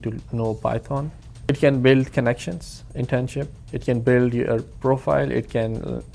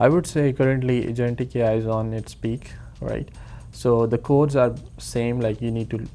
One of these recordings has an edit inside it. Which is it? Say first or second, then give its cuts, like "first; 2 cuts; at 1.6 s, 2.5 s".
first; 1 cut; at 1.2 s